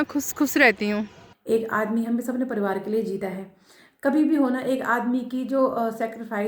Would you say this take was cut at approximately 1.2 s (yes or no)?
yes